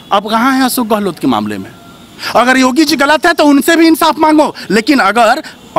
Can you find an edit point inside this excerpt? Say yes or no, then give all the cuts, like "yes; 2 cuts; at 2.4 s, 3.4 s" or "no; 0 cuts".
no; 0 cuts